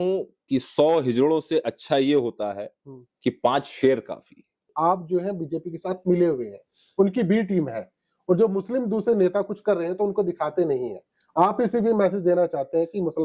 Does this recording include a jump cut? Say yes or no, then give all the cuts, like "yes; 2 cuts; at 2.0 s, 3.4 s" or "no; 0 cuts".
yes; 1 cut; at 4.7 s